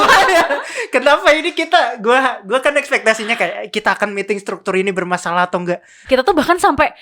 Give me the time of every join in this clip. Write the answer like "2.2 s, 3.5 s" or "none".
5.9 s